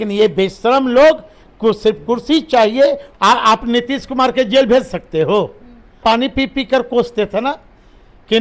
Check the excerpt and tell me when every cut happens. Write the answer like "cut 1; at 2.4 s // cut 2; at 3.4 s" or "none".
cut 1; at 3.1 s // cut 2; at 6.0 s